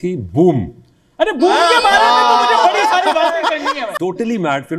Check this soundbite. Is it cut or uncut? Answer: cut